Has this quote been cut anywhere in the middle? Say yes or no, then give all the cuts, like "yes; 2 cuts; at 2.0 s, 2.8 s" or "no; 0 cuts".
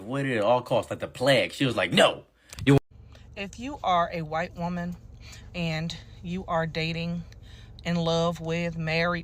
yes; 1 cut; at 2.8 s